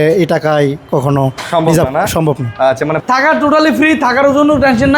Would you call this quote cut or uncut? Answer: cut